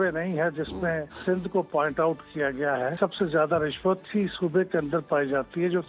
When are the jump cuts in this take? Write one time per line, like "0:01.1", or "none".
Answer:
0:01.1
0:02.9
0:04.1

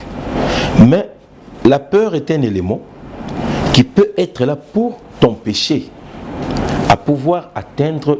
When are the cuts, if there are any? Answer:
none

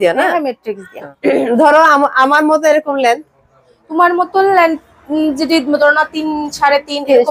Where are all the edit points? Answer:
0:01.1

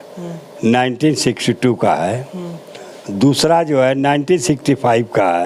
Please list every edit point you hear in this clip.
none

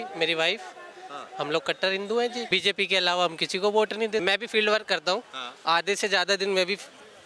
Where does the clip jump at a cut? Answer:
0:02.4
0:04.2

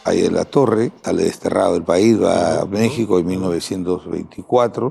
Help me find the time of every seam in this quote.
0:01.0

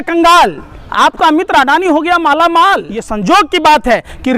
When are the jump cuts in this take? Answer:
0:03.0

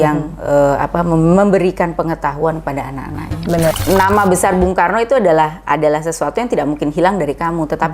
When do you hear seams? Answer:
0:03.7

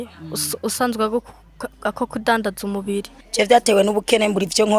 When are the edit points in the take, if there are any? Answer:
0:03.2

